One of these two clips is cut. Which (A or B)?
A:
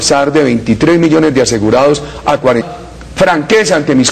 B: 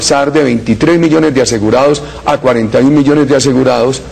B